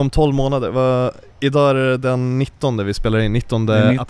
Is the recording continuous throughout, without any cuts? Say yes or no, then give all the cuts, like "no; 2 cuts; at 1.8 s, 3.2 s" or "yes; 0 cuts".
yes; 0 cuts